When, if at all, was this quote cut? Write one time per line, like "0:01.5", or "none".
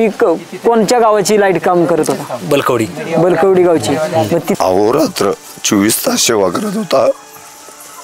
0:04.6